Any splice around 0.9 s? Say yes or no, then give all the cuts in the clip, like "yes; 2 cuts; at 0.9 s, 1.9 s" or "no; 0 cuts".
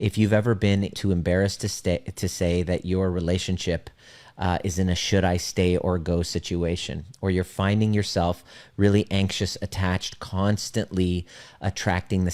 yes; 1 cut; at 0.9 s